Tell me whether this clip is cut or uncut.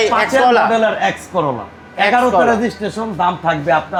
uncut